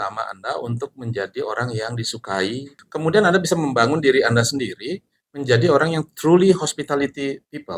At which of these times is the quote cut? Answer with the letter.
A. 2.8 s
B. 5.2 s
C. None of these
A